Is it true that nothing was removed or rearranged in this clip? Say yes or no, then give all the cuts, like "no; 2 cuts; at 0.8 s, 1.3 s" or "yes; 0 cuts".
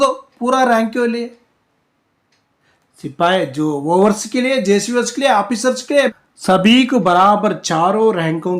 no; 1 cut; at 6.1 s